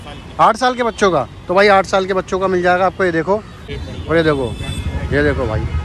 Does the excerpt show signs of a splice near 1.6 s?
no; 1 cut; at 3.7 s

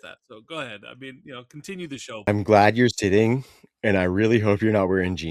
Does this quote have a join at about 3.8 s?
no; 1 cut; at 2.3 s

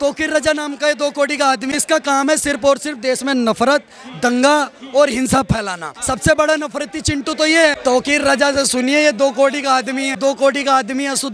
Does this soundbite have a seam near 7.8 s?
yes; 4 cuts; at 1.6 s, 5.9 s, 7.8 s, 10.2 s

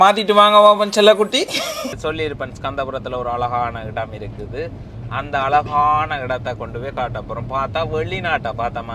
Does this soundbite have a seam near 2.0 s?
yes; 1 cut; at 2.0 s

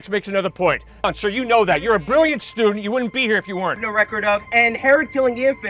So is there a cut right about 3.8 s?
yes; 2 cuts; at 1.1 s, 3.8 s

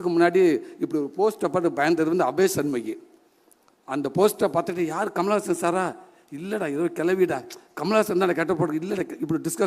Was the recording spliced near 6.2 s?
no; 0 cuts

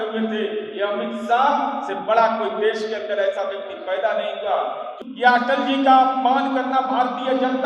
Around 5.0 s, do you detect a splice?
yes; 1 cut; at 5.0 s

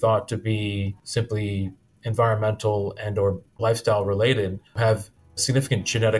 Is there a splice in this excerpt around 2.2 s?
no; 2 cuts; at 3.5 s, 4.8 s

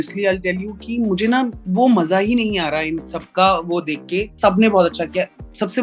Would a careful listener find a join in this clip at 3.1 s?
no; 1 cut; at 4.3 s

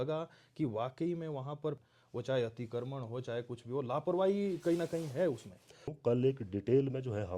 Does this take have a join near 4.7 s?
no; 2 cuts; at 1.8 s, 5.9 s

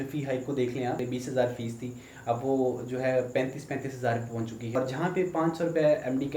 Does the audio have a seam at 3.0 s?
no; 2 cuts; at 1.0 s, 4.8 s

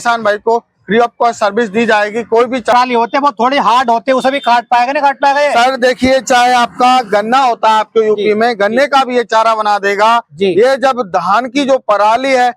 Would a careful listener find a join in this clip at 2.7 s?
yes; 1 cut; at 2.7 s

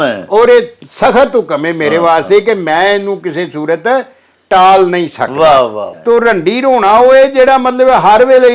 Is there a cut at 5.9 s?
yes; 1 cut; at 5.9 s

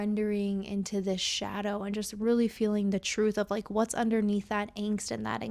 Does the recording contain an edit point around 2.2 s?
no; 0 cuts

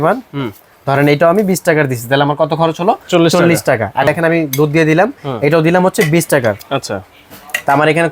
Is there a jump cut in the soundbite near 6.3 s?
no; 1 cut; at 4.1 s

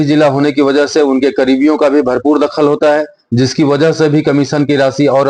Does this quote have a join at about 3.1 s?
no; 0 cuts

